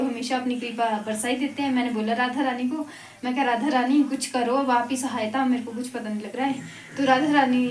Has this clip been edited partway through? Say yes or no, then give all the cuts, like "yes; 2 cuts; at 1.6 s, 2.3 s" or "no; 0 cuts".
no; 0 cuts